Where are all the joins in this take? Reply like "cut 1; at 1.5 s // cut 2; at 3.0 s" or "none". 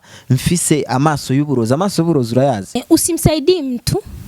cut 1; at 2.8 s